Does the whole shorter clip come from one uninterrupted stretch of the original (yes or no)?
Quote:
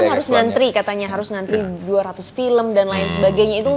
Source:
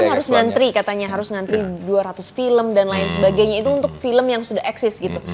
yes